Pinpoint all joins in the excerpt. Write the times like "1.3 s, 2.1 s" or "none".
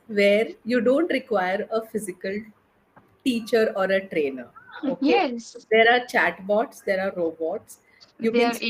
none